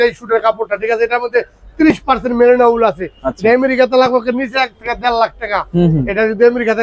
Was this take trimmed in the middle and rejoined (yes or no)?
no